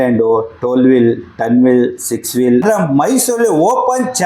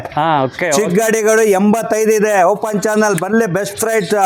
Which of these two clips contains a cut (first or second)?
first